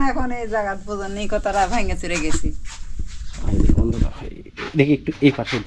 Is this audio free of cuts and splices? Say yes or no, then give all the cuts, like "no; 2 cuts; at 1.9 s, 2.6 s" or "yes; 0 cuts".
yes; 0 cuts